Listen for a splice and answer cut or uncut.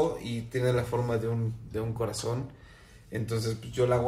uncut